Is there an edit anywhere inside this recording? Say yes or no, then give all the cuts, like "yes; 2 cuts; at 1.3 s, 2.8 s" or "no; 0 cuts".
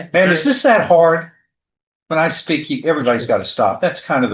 no; 0 cuts